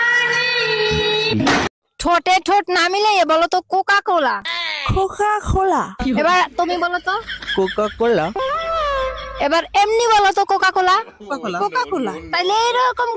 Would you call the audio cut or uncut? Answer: cut